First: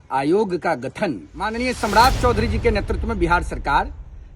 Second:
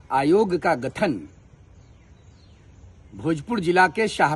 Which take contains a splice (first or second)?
first